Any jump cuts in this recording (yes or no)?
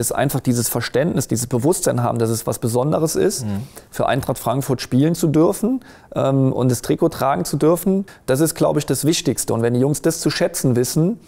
yes